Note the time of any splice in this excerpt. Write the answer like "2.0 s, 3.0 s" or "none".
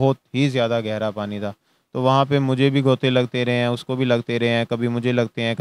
none